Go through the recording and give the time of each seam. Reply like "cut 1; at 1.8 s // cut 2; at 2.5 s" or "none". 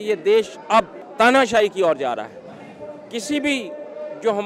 cut 1; at 1.0 s